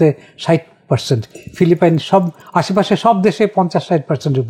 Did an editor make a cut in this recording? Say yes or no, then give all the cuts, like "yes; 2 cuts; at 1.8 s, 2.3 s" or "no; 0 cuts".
no; 0 cuts